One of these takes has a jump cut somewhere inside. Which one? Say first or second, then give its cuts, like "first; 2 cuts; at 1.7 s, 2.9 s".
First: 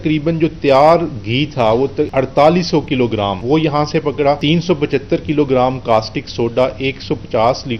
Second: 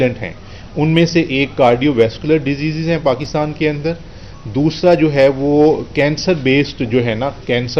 first; 3 cuts; at 2.1 s, 3.4 s, 4.4 s